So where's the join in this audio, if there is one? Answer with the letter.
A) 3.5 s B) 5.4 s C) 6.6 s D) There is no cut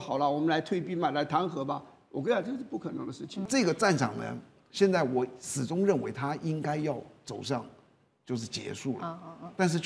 A